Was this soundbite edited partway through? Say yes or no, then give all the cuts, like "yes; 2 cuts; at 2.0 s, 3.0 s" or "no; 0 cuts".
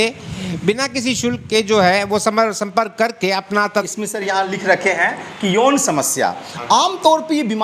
yes; 1 cut; at 3.9 s